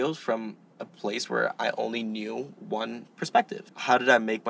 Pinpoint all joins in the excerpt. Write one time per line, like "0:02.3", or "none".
0:03.6